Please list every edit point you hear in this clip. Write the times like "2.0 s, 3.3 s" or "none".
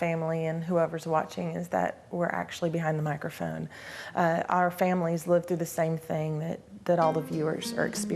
none